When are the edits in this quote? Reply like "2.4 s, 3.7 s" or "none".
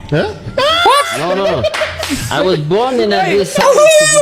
none